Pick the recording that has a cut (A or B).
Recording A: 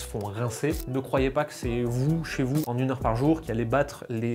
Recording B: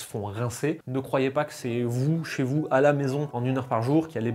A